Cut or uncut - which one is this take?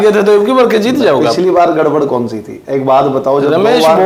uncut